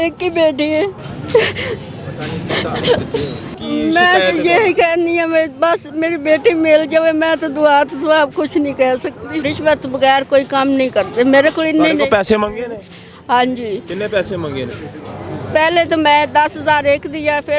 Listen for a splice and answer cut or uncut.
cut